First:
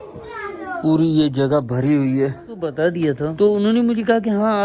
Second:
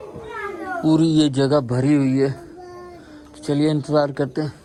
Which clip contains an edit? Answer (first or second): first